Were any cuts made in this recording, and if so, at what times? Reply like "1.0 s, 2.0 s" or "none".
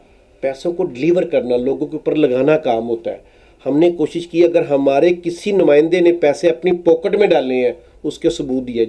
none